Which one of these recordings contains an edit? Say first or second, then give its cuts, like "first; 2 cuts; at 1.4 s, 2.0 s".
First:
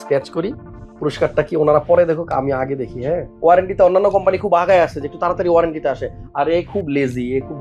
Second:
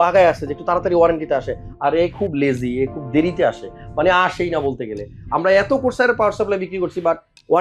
first; 1 cut; at 3.3 s